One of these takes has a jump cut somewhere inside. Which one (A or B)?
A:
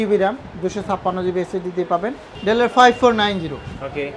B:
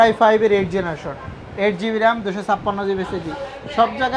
A